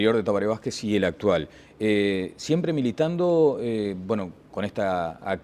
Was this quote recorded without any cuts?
no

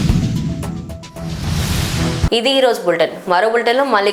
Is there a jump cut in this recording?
no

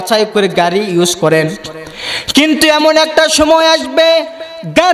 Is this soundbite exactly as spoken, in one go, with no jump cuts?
yes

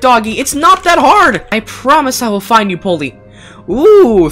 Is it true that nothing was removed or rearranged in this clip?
no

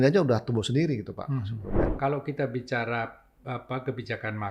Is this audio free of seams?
no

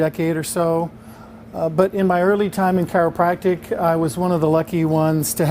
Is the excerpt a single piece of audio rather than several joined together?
no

